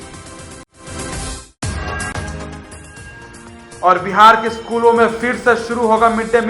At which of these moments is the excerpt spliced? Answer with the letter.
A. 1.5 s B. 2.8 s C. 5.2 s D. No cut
A